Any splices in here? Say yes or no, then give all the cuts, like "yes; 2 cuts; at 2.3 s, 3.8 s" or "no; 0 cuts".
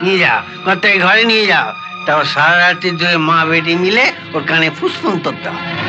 no; 0 cuts